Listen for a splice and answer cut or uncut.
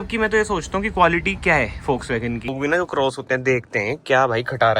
cut